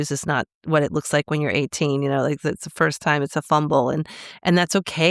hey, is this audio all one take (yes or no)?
yes